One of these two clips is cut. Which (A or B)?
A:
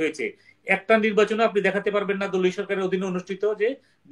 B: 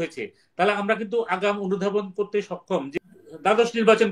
B